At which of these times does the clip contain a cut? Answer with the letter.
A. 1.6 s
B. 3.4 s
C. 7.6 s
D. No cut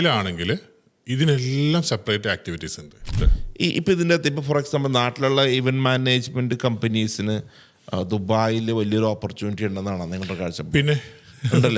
B